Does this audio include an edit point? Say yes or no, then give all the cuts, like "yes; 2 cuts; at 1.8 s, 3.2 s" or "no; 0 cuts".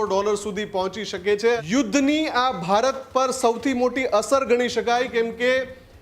yes; 1 cut; at 1.6 s